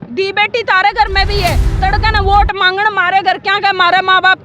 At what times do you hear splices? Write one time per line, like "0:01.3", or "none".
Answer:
0:01.7